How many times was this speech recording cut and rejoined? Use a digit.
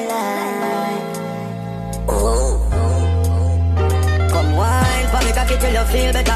0